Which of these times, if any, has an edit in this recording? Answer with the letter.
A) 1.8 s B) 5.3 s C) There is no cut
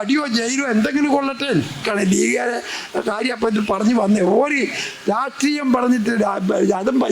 A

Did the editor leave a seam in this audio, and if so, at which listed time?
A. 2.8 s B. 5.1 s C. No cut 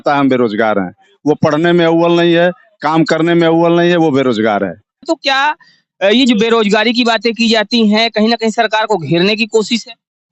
B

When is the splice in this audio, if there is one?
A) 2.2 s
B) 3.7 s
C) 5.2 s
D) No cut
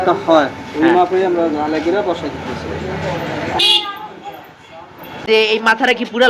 C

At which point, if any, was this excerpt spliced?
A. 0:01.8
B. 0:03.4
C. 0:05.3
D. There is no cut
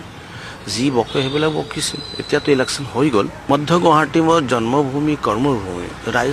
B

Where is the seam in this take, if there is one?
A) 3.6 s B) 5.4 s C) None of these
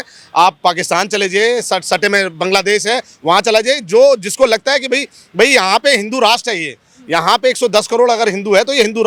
C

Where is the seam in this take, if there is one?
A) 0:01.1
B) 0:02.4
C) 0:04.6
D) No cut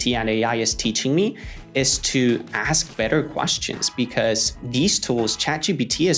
C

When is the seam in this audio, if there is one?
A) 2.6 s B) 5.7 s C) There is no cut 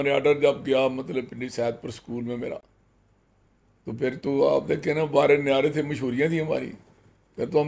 C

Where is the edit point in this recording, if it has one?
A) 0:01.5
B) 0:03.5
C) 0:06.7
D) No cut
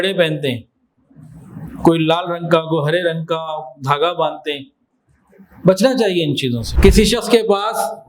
C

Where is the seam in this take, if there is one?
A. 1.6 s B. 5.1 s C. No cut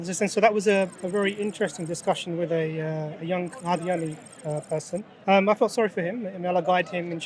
B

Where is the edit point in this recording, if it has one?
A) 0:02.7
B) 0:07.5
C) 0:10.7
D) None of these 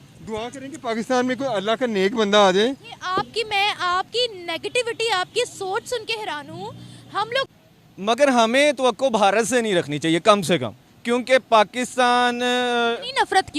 B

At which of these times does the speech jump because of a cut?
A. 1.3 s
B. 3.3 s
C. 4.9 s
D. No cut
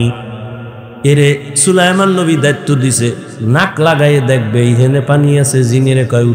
B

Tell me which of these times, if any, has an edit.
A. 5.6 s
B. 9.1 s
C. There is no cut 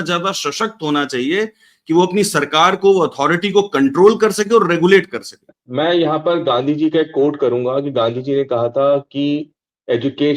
A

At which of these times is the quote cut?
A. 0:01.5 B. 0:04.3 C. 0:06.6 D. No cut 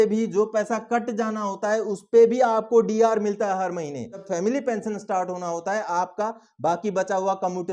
B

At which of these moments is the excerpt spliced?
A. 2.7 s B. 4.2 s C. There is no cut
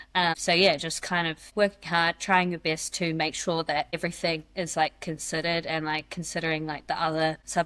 C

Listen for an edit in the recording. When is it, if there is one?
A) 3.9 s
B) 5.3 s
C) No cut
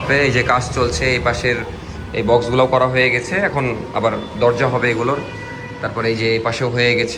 C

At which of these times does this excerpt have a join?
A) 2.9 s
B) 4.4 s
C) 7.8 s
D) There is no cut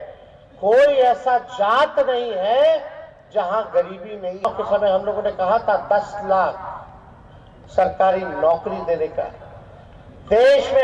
B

